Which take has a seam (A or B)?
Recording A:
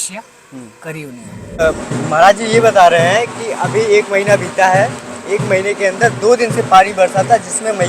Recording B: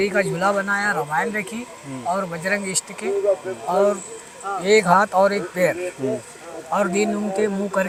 A